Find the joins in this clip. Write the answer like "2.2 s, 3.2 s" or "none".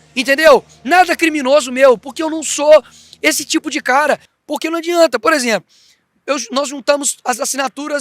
4.3 s